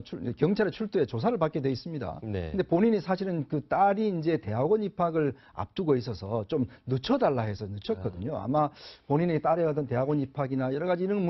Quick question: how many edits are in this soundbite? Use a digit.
1